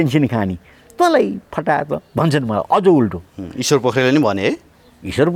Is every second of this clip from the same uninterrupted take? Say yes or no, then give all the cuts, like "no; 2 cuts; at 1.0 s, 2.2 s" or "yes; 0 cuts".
yes; 0 cuts